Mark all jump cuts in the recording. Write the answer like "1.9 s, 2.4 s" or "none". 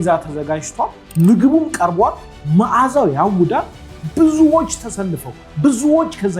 1.0 s